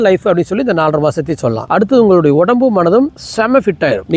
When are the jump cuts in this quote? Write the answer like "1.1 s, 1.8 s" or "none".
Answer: none